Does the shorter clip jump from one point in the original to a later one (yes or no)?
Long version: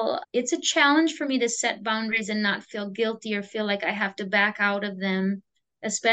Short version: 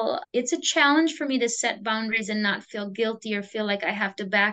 no